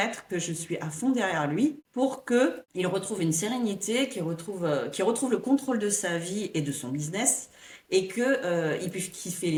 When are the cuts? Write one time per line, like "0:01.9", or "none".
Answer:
none